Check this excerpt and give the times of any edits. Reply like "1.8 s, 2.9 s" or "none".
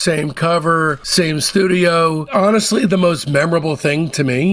2.2 s